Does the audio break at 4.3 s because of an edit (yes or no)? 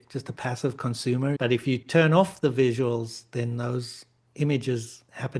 no